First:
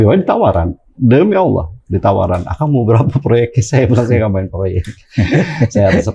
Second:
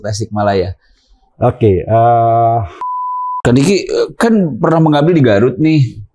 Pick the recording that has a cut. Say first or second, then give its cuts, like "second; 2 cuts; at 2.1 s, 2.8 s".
second; 1 cut; at 3.1 s